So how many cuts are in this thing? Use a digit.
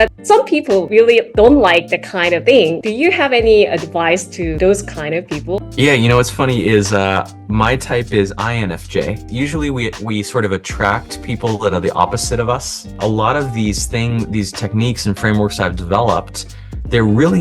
5